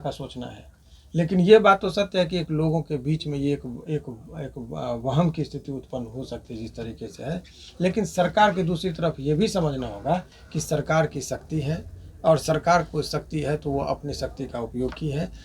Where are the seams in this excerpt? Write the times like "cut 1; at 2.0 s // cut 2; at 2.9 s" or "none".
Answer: none